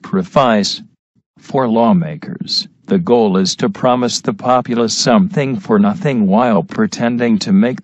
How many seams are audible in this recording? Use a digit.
1